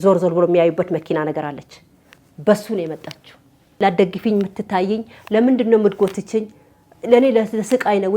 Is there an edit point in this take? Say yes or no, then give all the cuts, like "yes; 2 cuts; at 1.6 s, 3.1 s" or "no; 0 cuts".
yes; 1 cut; at 3.8 s